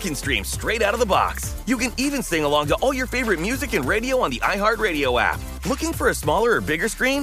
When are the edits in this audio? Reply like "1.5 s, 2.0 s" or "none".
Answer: none